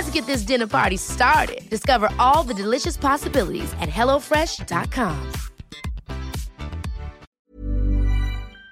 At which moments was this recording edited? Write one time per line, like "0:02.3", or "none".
0:07.2